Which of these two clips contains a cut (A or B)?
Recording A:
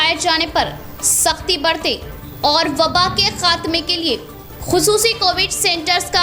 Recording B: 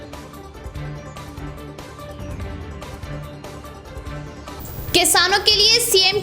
B